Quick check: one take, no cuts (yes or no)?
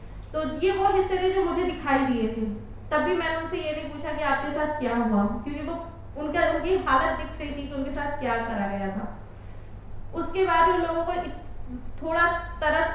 yes